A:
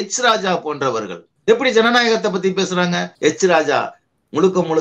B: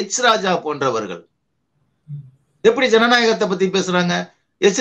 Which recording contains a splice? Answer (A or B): A